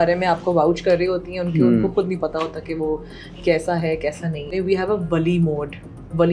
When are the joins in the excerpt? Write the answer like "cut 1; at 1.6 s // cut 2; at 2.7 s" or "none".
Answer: cut 1; at 4.5 s

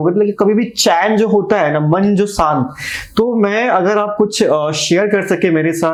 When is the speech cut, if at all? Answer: none

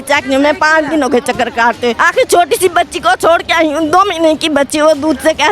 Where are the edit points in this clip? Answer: cut 1; at 2.0 s

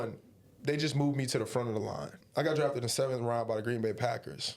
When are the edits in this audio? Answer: cut 1; at 2.2 s

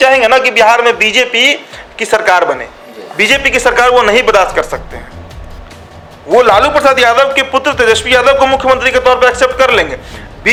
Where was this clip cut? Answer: none

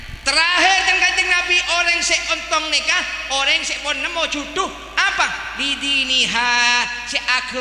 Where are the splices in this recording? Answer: none

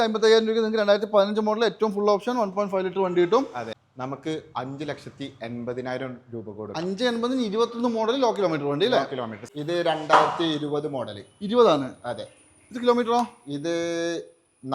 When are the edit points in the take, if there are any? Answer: cut 1; at 3.7 s // cut 2; at 9.4 s

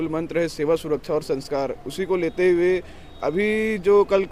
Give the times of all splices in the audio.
none

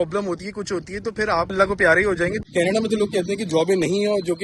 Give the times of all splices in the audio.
cut 1; at 2.4 s

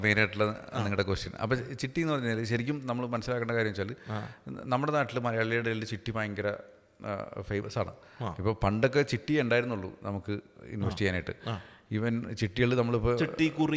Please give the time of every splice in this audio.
none

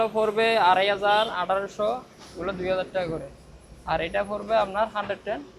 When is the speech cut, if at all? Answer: none

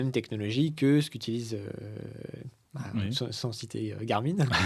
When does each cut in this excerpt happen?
none

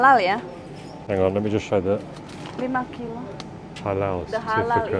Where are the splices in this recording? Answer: cut 1; at 0.9 s

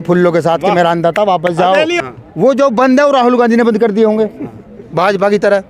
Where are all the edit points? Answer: cut 1; at 2.0 s

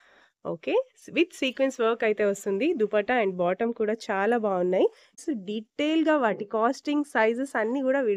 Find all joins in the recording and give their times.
cut 1; at 5.2 s

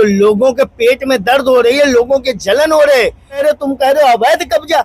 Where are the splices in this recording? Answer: cut 1; at 3.4 s

